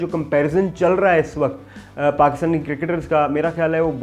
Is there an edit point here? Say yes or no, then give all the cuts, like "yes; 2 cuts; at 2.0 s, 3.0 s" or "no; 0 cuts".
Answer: no; 0 cuts